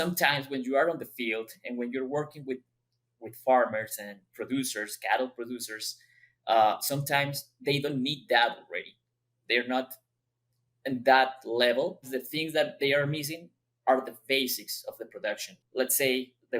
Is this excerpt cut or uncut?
cut